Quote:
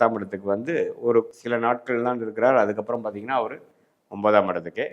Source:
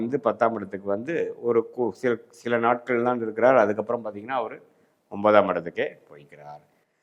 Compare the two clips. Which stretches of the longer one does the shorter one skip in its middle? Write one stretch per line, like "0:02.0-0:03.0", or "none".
0:01.7-0:02.3